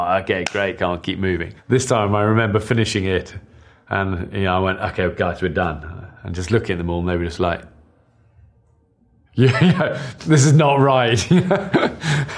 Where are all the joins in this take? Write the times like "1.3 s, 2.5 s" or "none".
9.3 s

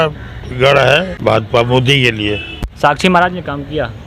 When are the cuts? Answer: 1.1 s, 2.7 s

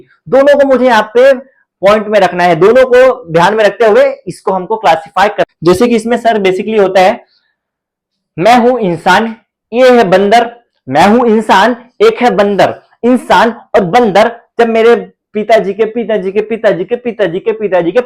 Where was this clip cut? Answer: 5.5 s

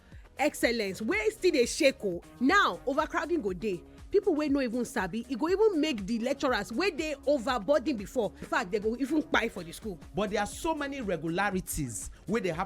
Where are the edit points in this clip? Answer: 2.2 s, 8.4 s, 9.9 s

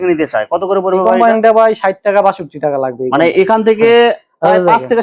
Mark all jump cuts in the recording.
none

